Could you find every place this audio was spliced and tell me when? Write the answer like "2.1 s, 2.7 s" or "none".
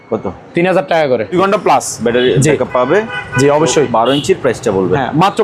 1.3 s